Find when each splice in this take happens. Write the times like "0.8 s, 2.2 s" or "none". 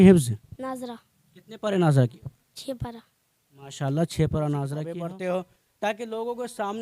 4.8 s